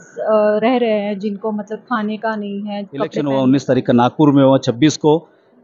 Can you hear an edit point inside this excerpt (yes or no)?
yes